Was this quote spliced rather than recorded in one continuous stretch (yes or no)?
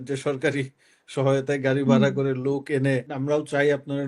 yes